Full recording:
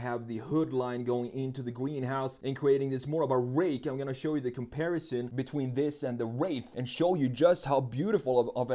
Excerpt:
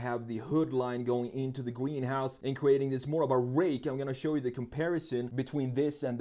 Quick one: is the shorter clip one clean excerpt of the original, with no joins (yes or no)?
yes